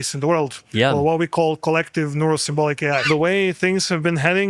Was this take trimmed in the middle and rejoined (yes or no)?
yes